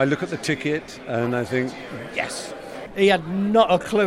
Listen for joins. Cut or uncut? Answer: cut